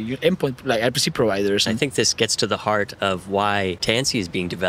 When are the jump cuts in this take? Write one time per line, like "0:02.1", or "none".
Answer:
0:01.7
0:03.8